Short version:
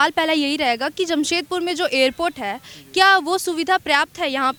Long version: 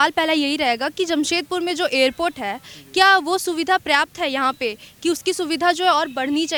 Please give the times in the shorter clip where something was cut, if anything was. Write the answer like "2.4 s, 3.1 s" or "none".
none